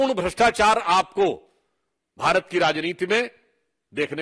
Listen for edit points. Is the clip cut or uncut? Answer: uncut